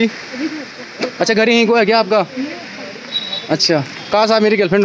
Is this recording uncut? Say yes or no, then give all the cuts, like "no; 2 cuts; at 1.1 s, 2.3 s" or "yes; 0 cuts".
yes; 0 cuts